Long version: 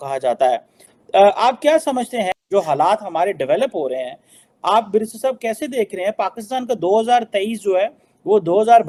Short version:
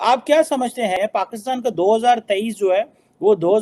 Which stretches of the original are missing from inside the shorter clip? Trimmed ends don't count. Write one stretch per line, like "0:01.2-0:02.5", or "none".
0:02.3-0:06.0